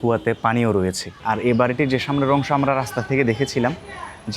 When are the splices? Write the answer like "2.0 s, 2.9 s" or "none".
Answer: 1.1 s